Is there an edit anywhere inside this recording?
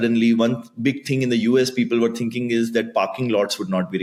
no; 0 cuts

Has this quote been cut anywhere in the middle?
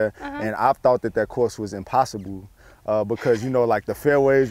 no; 0 cuts

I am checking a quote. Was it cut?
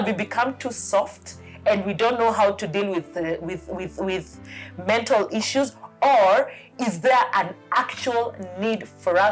no; 0 cuts

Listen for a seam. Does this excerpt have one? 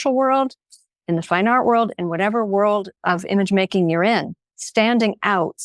no; 0 cuts

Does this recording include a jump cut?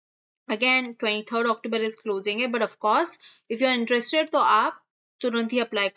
no; 0 cuts

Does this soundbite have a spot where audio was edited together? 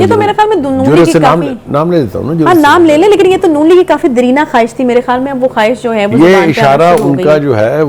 no; 0 cuts

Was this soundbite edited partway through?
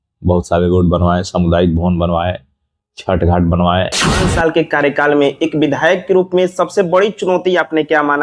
yes; 1 cut; at 4.2 s

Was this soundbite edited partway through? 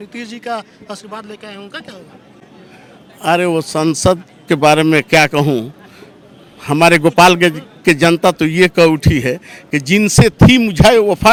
no; 0 cuts

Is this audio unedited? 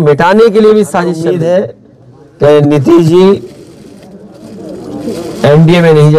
no; 1 cut; at 1.3 s

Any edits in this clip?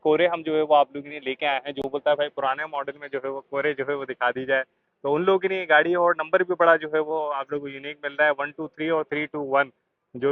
no; 0 cuts

